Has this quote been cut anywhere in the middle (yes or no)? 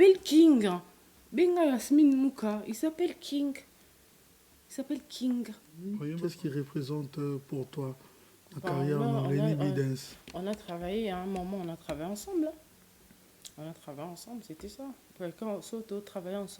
yes